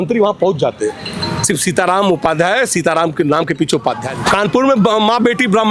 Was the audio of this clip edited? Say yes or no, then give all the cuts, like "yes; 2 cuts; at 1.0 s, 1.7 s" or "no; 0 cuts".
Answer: yes; 1 cut; at 4.1 s